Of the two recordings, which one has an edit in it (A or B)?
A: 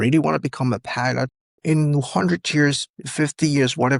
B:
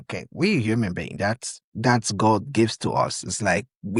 A